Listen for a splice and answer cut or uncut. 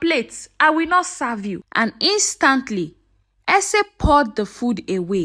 cut